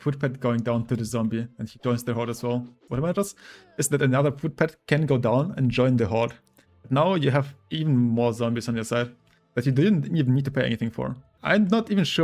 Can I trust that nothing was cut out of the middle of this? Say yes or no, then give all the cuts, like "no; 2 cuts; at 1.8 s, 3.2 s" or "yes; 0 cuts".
no; 2 cuts; at 2.8 s, 11.3 s